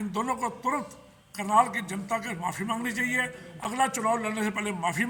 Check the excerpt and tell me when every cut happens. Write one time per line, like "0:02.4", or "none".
none